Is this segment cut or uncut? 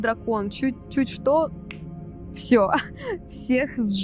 uncut